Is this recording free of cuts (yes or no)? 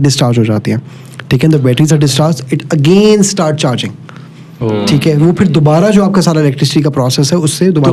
yes